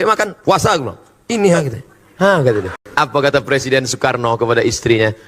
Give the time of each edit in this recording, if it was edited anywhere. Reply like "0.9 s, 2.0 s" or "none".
2.8 s

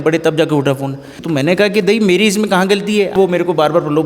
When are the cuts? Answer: 1.1 s, 3.1 s

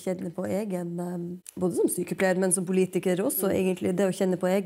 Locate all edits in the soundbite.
1.4 s

